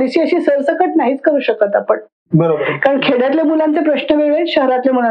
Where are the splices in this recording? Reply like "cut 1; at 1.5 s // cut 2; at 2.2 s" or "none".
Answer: none